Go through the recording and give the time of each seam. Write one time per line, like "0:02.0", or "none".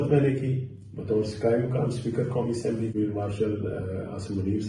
0:02.9